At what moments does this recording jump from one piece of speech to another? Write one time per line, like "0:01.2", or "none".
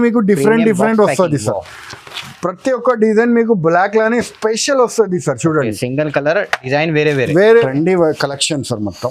0:07.6